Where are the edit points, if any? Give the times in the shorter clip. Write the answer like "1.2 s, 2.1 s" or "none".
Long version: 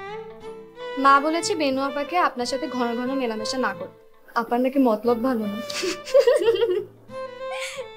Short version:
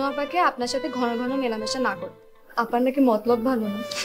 none